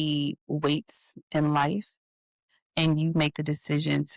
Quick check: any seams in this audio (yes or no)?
yes